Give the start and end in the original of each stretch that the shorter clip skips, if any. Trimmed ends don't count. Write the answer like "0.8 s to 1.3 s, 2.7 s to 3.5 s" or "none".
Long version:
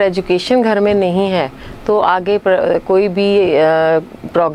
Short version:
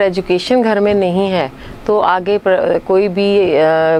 none

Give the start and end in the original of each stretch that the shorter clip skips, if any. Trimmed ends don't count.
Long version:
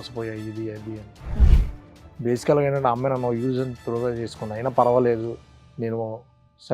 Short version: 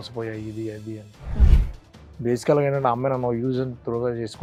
none

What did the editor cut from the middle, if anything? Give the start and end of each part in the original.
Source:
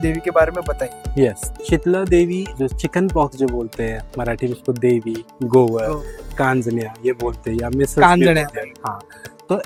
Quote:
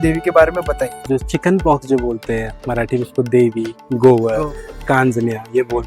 1.0 s to 2.5 s

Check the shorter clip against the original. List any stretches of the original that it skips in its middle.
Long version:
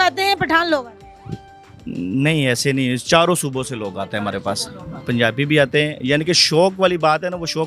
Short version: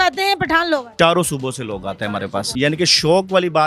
0.9 s to 3.0 s, 4.6 s to 6.0 s

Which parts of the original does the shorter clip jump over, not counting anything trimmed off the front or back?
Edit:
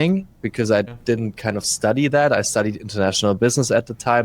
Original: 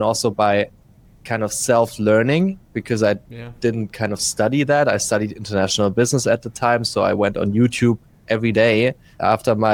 3.3 s to 3.5 s

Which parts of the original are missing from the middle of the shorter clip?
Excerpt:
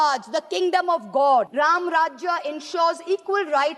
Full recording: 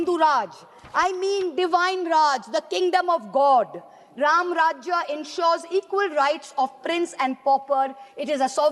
3.7 s to 4.1 s

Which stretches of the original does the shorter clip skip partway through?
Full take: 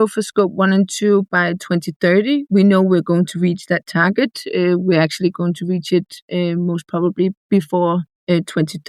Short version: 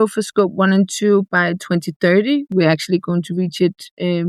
2.5 s to 4.8 s

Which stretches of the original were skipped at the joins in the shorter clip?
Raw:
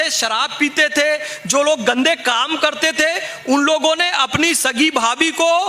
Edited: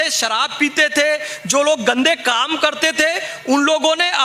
none

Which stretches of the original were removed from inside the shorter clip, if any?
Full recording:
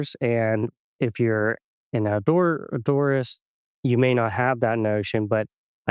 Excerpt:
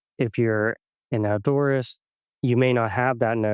2.2 s to 2.8 s

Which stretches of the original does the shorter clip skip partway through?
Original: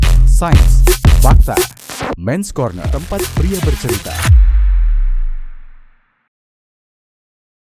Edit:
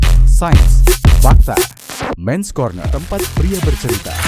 none

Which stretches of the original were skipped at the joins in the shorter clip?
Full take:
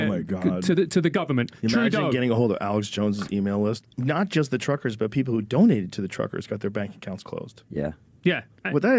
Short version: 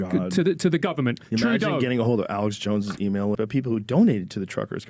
3.7 s to 5.0 s

